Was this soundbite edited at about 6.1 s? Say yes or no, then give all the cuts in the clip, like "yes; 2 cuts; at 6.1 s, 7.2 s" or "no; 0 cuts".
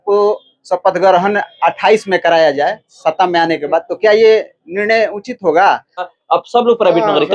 yes; 1 cut; at 6.1 s